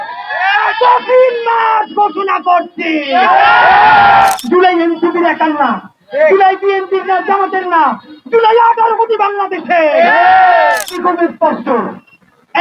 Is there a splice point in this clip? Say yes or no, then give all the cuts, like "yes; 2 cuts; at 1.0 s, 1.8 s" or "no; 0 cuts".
yes; 2 cuts; at 4.3 s, 10.9 s